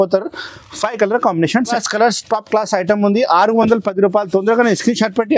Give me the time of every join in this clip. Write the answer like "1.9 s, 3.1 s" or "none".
1.7 s